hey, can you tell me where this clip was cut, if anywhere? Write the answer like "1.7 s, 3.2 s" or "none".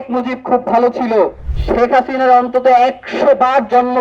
1.5 s

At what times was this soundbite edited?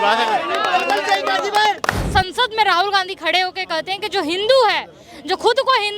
2.0 s

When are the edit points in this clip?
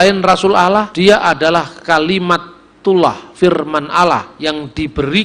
0.9 s, 4.3 s

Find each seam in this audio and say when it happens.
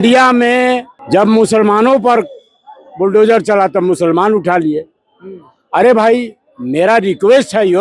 0.9 s

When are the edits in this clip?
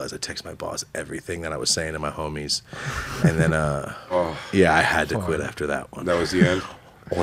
none

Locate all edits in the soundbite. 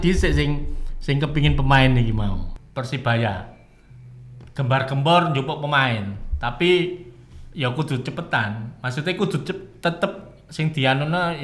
2.5 s

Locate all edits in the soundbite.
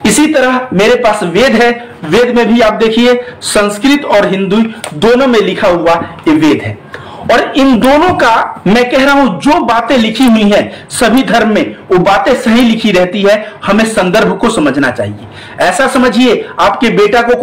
none

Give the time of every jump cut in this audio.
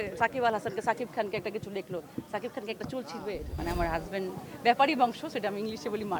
3.5 s

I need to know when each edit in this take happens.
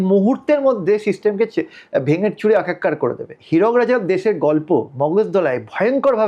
3.3 s

